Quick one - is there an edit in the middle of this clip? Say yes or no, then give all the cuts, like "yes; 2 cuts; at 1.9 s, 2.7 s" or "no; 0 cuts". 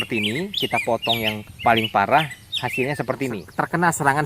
yes; 2 cuts; at 1.5 s, 3.4 s